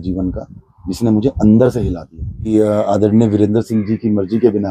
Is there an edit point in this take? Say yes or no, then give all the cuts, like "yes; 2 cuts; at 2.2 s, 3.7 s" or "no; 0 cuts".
yes; 1 cut; at 2.5 s